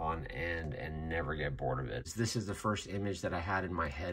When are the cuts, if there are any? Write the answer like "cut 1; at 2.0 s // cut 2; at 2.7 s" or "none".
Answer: cut 1; at 2.1 s